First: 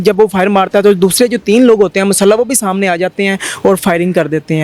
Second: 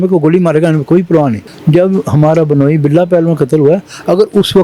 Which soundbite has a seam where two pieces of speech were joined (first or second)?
second